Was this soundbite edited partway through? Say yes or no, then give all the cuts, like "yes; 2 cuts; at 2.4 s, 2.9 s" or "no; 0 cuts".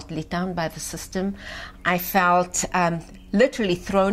no; 0 cuts